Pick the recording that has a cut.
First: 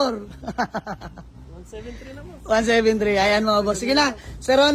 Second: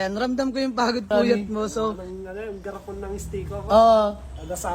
second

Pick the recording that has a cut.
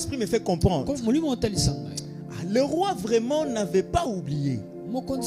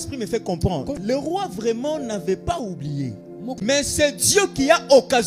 second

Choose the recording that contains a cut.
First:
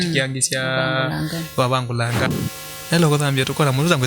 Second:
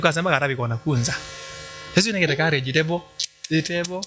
first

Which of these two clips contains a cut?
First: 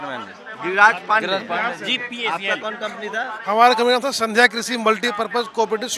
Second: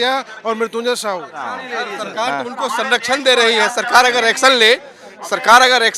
second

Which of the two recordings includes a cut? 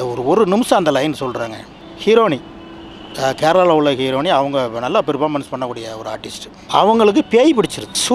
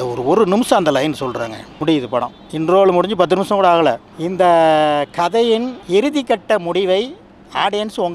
second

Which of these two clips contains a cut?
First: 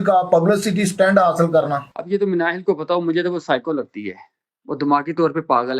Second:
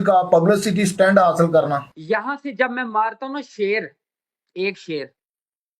second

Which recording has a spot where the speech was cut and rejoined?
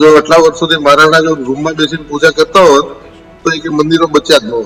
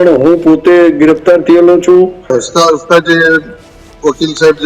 second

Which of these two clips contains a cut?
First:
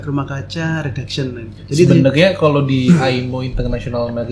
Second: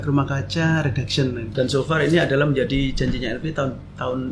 second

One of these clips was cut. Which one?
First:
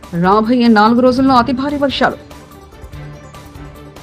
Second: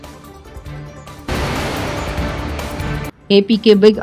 second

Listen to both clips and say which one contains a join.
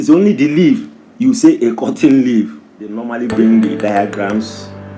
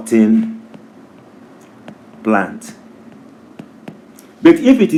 first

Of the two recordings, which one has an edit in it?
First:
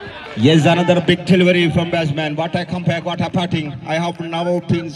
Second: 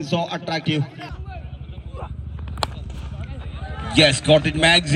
second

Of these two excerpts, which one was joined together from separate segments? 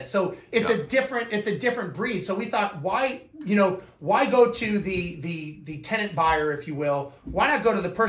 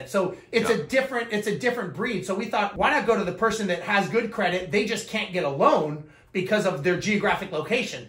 second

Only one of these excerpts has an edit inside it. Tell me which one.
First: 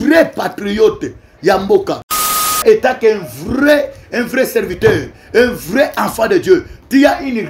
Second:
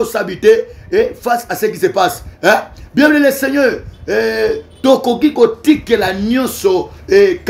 first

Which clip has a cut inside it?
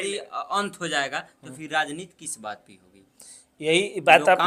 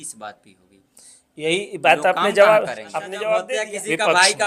second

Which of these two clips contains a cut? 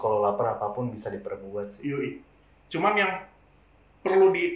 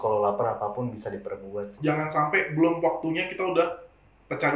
second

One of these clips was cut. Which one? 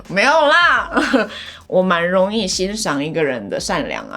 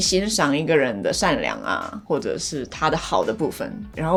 first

